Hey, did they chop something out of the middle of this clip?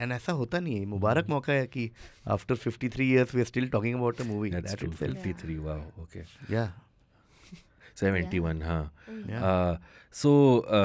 no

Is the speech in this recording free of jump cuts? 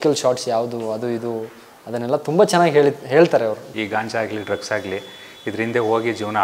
no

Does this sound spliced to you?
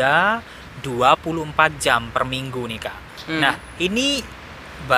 no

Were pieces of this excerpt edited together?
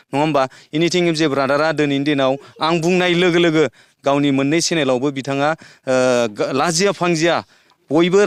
no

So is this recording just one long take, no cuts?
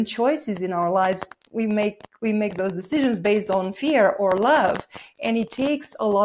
yes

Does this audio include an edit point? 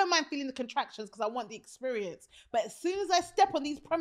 no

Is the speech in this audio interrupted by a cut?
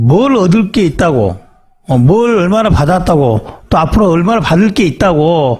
no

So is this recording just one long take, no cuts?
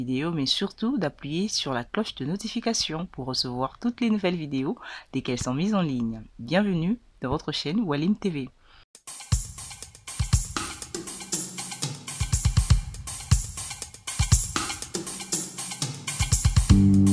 yes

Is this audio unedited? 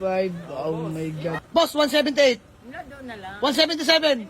no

